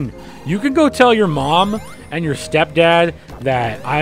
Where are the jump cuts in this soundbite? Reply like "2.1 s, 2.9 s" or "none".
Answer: none

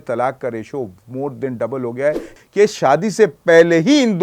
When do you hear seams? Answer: 2.3 s

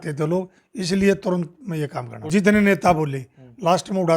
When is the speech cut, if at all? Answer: 2.2 s

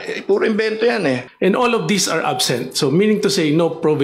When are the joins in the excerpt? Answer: 1.3 s

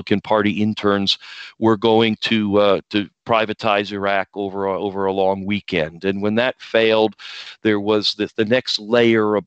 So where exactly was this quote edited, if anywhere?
none

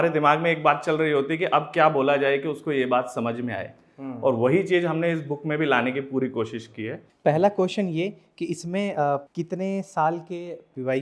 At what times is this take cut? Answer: 7.0 s, 9.3 s

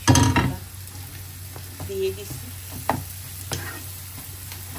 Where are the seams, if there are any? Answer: none

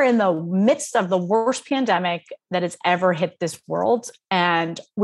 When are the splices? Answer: none

